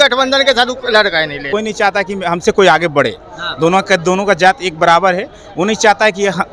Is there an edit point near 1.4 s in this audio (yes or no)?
yes